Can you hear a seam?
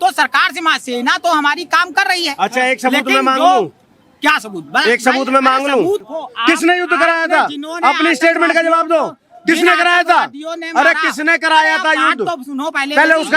yes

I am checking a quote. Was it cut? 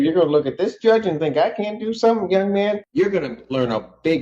yes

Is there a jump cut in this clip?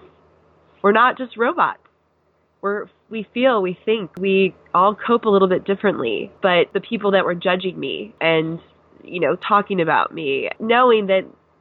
yes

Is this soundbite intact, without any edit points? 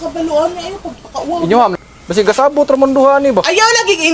no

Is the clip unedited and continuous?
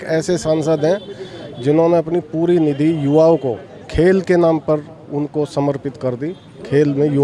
yes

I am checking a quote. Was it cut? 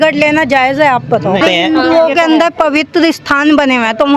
yes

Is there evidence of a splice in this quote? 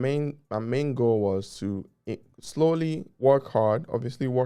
no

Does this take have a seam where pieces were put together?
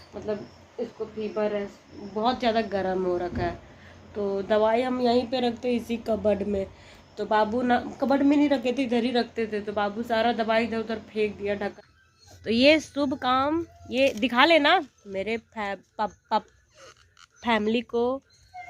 yes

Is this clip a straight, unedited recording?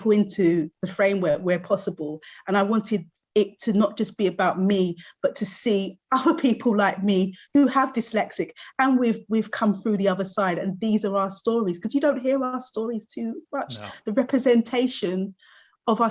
yes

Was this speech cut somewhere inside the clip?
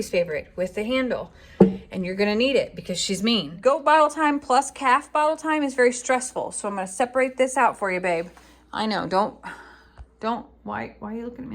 yes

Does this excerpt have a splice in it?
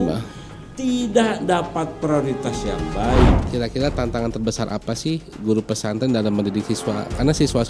yes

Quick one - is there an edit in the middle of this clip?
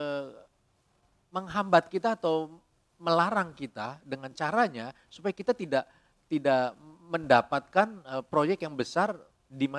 no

